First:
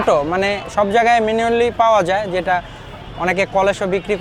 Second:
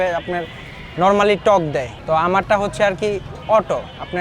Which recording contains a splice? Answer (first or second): second